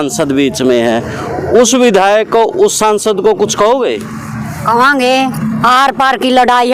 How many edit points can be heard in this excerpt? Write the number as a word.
zero